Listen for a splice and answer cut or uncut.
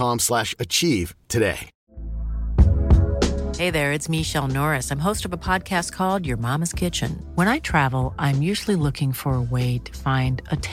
cut